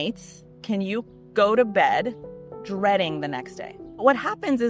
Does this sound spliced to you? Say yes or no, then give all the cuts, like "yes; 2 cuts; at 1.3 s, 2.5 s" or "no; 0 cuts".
no; 0 cuts